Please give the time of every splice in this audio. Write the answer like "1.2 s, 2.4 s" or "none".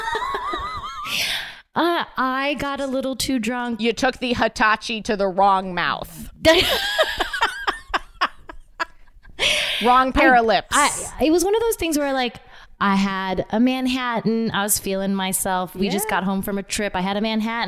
none